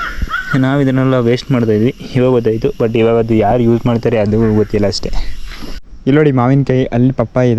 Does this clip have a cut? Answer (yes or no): yes